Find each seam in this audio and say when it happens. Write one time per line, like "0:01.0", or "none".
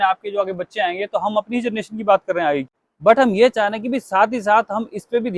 none